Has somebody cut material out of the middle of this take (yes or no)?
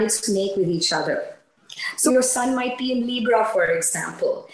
yes